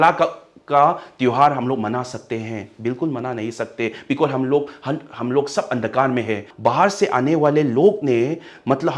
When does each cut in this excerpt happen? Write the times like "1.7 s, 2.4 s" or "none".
6.5 s